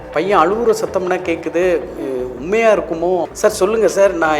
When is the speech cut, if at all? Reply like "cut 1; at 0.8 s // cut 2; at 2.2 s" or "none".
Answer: cut 1; at 3.3 s